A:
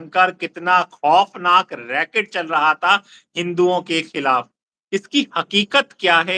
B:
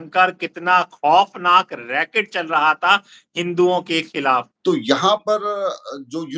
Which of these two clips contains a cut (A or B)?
B